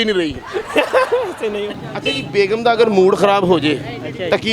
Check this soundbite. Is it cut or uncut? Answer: cut